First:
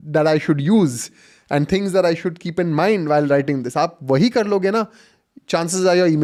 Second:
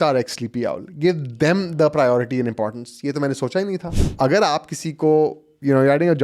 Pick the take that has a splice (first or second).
second